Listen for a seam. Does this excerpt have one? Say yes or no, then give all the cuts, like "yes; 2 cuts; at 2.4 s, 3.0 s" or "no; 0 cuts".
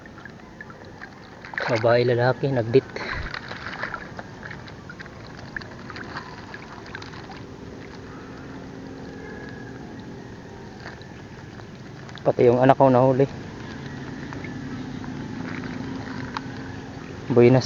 no; 0 cuts